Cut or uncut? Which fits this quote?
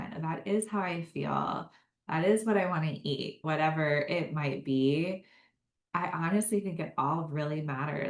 cut